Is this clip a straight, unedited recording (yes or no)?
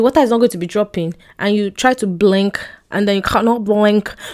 yes